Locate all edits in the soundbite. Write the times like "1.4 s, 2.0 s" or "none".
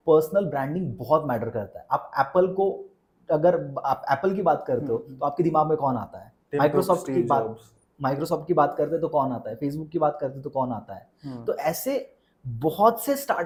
none